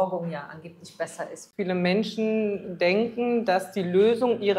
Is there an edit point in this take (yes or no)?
yes